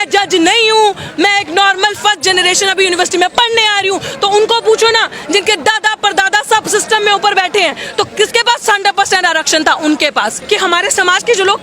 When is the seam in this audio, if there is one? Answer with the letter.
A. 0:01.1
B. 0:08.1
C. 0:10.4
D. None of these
C